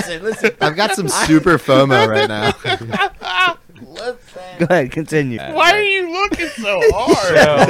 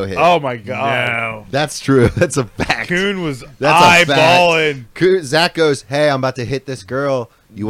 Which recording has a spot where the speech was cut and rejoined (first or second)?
first